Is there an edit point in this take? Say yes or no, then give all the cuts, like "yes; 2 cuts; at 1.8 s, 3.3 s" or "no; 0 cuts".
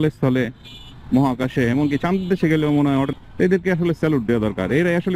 yes; 1 cut; at 3.1 s